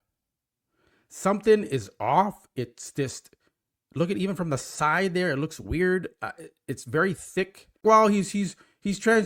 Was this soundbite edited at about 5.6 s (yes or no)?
no